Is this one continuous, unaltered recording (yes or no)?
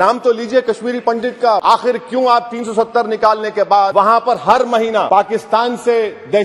no